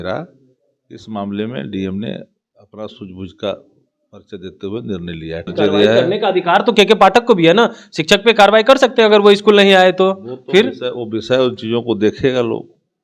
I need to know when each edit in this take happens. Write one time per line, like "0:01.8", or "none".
0:05.5